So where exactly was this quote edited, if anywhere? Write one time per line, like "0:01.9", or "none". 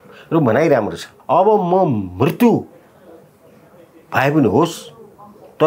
0:01.1